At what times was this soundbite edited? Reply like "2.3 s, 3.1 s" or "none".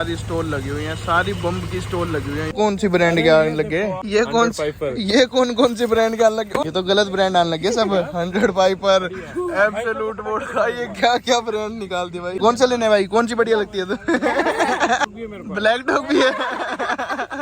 2.5 s, 4.0 s, 6.6 s, 12.4 s, 15.0 s